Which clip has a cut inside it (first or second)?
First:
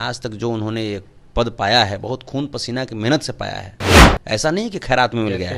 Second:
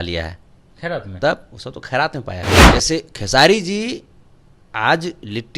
second